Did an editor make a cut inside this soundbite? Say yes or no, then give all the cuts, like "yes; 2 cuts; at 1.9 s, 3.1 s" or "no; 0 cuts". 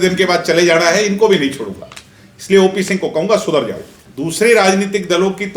yes; 1 cut; at 4.0 s